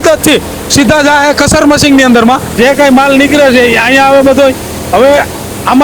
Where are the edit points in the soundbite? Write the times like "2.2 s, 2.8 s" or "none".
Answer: 2.5 s

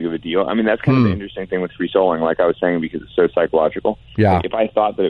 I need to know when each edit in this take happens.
none

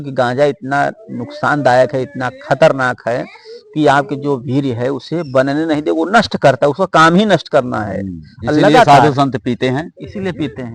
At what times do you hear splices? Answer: none

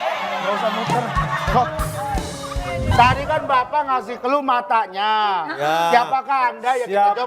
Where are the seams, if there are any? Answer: 2.9 s

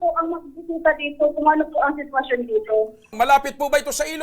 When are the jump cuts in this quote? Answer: 3.0 s

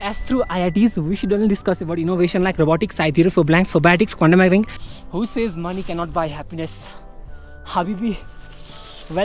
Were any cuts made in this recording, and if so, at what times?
4.8 s

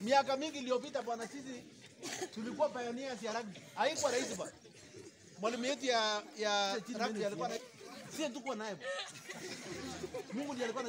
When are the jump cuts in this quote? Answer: 7.6 s

